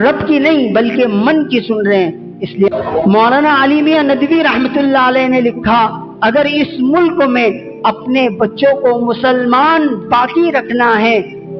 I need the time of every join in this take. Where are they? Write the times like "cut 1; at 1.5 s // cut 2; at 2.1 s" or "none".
cut 1; at 2.7 s

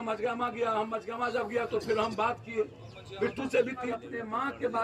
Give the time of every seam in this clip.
cut 1; at 3.9 s

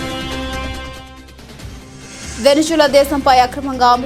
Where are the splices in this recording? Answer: none

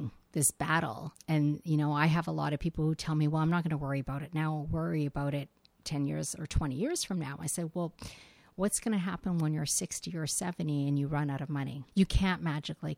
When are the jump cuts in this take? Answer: cut 1; at 11.8 s

